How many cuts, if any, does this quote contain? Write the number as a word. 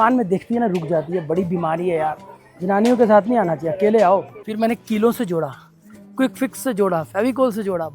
one